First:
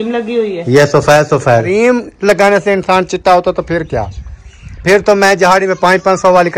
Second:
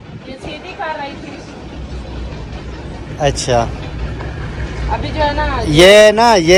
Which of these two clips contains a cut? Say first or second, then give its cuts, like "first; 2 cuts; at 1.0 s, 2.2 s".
first; 1 cut; at 1.7 s